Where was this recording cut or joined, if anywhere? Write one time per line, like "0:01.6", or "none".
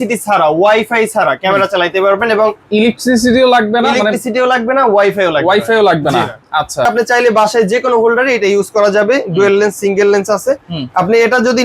0:06.9